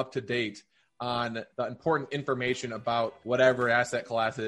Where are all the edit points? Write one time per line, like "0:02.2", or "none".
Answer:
0:03.2